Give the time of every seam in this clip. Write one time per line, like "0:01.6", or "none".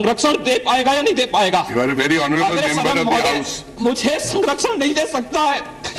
none